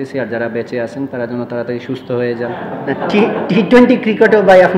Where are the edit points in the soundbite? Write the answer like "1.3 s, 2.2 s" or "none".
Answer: 2.6 s

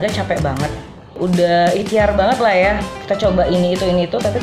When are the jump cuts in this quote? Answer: none

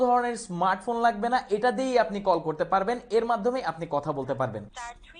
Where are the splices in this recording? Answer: none

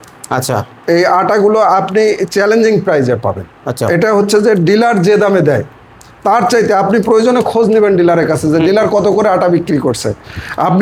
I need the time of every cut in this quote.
none

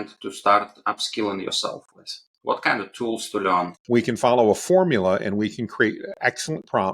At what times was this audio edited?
3.8 s

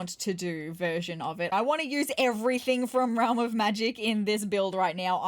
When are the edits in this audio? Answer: 1.5 s

